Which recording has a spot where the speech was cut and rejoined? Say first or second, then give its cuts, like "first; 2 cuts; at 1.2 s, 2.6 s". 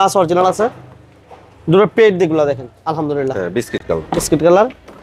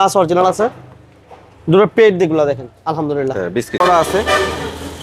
second; 1 cut; at 3.8 s